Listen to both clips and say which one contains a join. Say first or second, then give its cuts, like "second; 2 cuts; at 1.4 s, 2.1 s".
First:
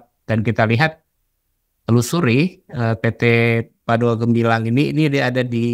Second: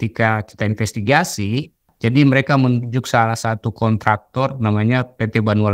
second; 1 cut; at 1.9 s